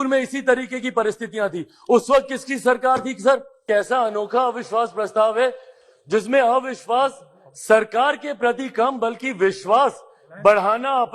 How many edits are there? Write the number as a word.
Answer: one